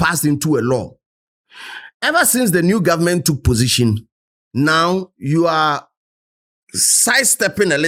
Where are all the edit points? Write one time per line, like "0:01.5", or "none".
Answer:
none